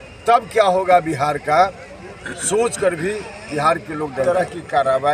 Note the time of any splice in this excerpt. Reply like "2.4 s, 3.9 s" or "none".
4.2 s